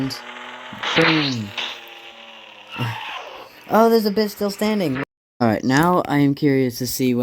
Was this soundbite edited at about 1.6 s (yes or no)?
no